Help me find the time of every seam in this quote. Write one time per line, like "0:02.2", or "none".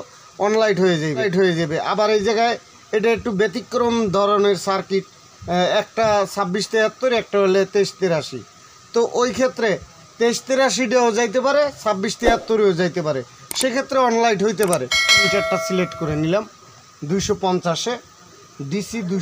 0:01.3
0:15.3